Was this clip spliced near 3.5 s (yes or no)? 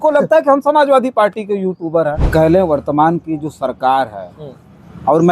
no